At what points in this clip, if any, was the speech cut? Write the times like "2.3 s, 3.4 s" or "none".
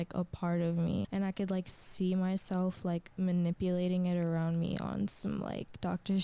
1.1 s